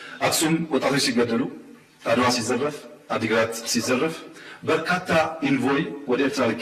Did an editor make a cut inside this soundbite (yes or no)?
no